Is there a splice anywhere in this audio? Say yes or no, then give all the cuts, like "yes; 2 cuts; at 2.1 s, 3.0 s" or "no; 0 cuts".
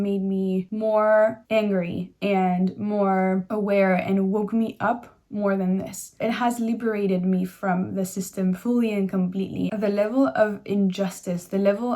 yes; 1 cut; at 9.7 s